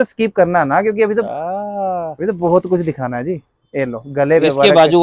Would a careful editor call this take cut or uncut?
uncut